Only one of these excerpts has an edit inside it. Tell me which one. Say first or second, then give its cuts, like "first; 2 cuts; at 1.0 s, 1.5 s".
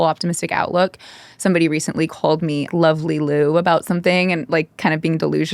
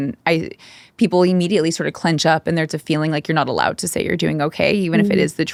first; 1 cut; at 2.7 s